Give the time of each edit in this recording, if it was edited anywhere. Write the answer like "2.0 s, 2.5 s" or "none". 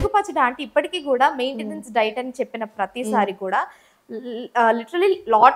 none